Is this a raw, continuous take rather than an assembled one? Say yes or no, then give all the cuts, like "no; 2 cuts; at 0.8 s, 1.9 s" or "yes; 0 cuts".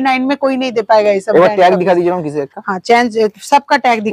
yes; 0 cuts